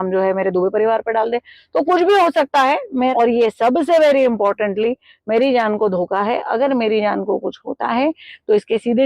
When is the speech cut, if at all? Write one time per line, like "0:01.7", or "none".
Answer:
0:03.1